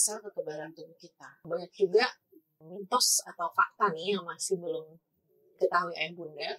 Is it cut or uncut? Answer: cut